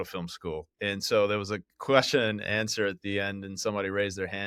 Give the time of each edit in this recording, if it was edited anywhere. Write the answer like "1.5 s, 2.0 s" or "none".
none